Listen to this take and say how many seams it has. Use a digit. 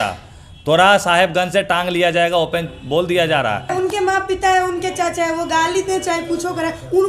1